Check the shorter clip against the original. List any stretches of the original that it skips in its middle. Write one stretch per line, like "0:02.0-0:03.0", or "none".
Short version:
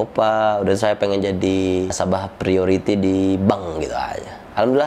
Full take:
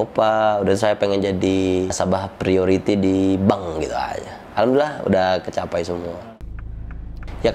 none